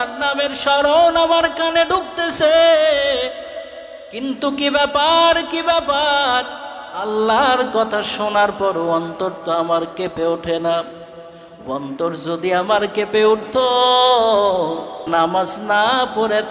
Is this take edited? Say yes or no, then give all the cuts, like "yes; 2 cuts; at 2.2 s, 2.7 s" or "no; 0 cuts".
yes; 1 cut; at 15.0 s